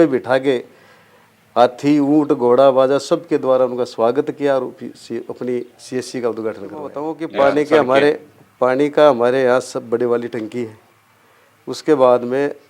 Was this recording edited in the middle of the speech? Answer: yes; 1 cut; at 7.2 s

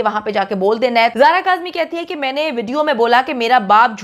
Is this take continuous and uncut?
no; 1 cut; at 1.1 s

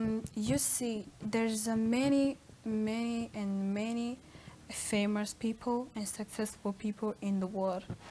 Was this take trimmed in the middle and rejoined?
no; 0 cuts

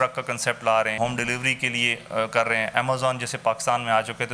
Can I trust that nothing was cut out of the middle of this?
no; 1 cut; at 0.9 s

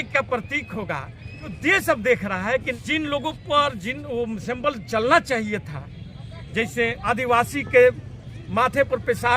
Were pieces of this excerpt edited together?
yes; 3 cuts; at 1.5 s, 2.7 s, 7.0 s

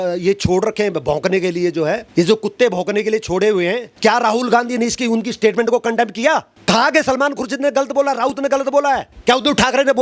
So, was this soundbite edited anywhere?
yes; 4 cuts; at 2.1 s, 3.9 s, 6.5 s, 9.1 s

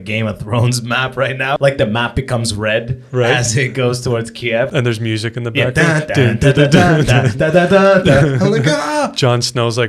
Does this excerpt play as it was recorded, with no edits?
no; 2 cuts; at 1.6 s, 4.7 s

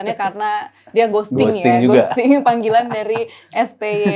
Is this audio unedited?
yes; 0 cuts

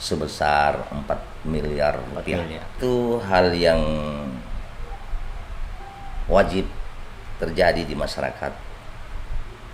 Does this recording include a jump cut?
yes; 1 cut; at 2.8 s

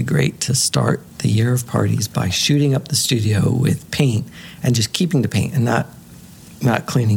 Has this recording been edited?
no; 0 cuts

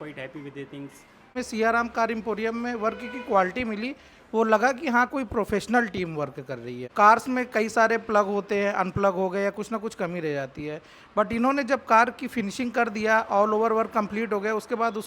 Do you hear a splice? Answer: yes; 2 cuts; at 1.4 s, 6.8 s

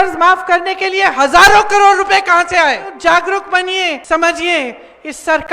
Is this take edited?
yes; 2 cuts; at 2.9 s, 4.0 s

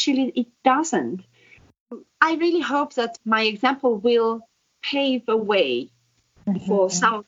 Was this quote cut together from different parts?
yes; 2 cuts; at 1.8 s, 3.2 s

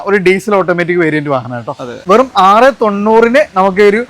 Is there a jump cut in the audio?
yes; 1 cut; at 2.0 s

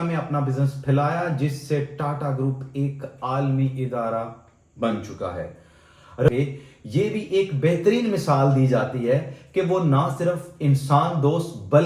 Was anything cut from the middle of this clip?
yes; 1 cut; at 6.3 s

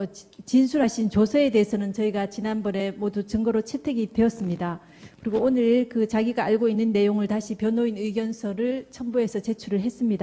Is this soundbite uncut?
yes; 0 cuts

